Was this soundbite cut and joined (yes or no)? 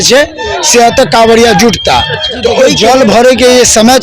yes